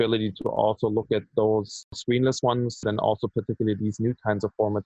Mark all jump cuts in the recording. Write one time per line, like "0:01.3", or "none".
0:01.9
0:02.8

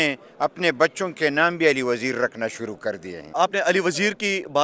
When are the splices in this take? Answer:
0:03.3

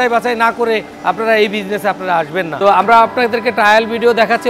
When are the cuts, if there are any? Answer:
0:02.5

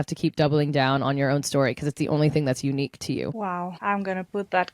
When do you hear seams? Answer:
0:03.4

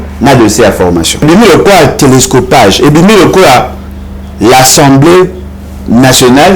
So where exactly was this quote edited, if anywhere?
0:01.2

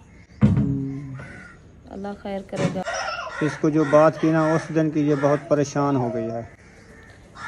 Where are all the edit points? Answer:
0:02.8

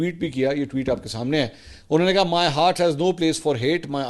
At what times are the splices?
none

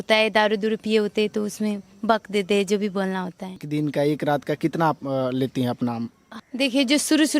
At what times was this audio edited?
0:03.6
0:06.2

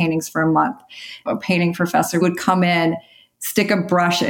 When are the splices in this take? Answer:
0:01.2
0:02.2

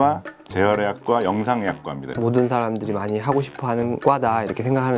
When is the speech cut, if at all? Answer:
0:02.1

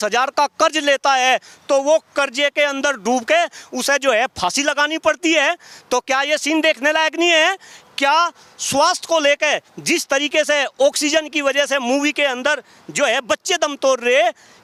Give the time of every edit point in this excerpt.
none

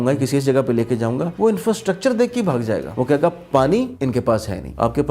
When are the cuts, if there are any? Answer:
0:01.3
0:02.9
0:04.3

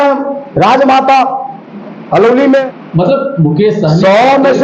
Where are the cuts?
0:02.8

